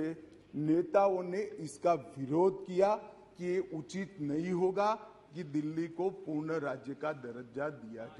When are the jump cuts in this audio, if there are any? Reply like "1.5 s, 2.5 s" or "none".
none